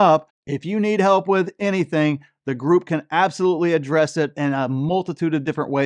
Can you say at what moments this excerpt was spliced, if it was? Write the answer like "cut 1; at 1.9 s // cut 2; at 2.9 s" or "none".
none